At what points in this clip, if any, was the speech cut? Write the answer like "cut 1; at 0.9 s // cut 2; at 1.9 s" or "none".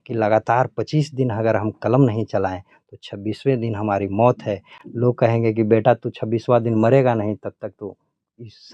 none